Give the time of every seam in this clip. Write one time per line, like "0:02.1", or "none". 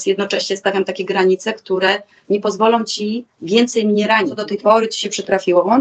0:04.4